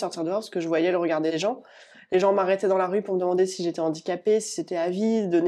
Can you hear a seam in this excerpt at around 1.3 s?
yes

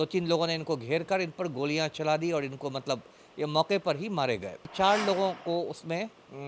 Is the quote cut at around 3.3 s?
no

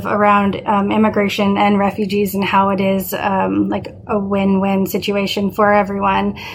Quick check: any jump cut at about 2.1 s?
no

